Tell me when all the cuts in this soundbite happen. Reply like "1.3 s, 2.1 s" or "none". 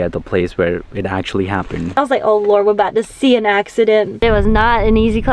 2.0 s, 4.2 s